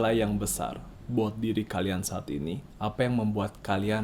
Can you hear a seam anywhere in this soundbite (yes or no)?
yes